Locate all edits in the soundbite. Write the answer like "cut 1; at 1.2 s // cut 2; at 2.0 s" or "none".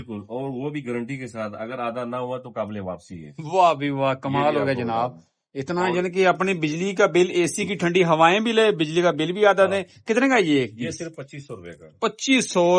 none